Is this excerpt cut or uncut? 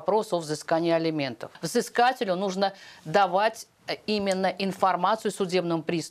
cut